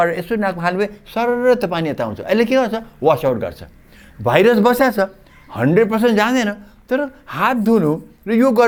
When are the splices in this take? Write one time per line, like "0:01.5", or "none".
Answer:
none